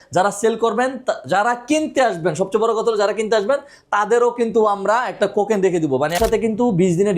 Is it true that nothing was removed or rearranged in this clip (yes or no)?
no